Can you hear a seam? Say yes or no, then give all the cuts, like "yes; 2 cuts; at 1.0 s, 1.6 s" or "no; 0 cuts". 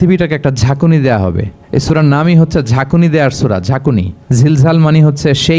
yes; 2 cuts; at 1.5 s, 4.2 s